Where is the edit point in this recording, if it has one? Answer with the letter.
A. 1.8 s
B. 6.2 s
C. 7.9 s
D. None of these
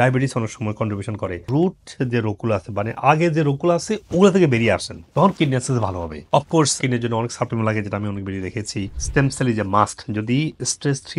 D